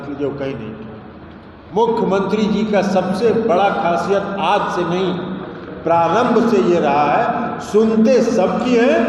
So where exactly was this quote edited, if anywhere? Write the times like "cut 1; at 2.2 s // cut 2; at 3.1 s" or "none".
cut 1; at 1.5 s